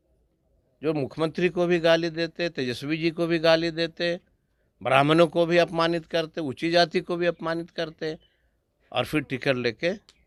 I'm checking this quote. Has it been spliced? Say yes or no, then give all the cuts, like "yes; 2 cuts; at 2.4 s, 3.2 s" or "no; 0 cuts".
no; 0 cuts